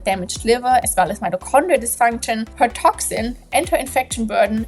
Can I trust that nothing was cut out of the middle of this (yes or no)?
no